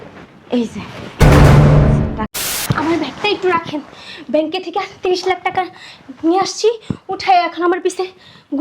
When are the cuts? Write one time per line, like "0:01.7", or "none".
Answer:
0:02.6